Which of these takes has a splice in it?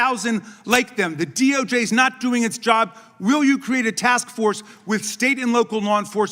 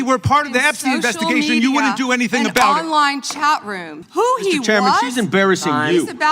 second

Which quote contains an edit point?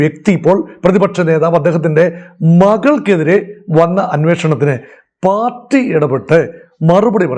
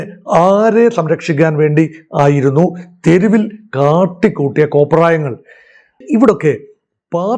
second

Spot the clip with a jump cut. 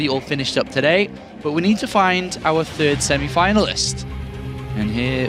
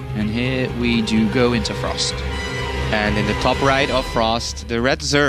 second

